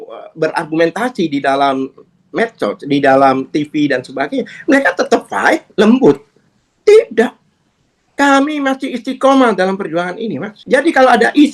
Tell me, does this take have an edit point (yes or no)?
yes